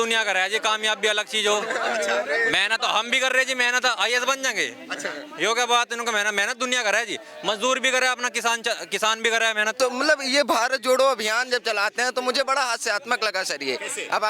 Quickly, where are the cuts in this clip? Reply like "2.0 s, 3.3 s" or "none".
none